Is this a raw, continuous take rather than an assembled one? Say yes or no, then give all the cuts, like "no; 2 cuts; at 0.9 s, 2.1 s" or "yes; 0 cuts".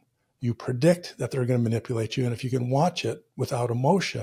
yes; 0 cuts